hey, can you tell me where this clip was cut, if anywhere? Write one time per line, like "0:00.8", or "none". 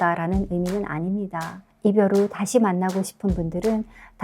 0:01.6